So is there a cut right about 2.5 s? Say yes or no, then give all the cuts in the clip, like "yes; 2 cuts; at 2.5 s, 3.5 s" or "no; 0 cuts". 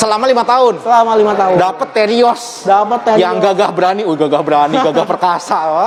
no; 0 cuts